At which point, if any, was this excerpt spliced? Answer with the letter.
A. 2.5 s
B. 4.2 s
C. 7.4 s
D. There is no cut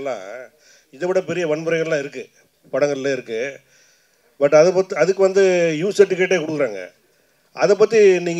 D